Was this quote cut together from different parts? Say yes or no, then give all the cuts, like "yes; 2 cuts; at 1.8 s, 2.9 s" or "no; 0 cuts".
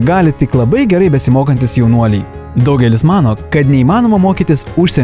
yes; 1 cut; at 2.4 s